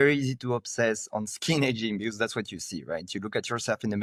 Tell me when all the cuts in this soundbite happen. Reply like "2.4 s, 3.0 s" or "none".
none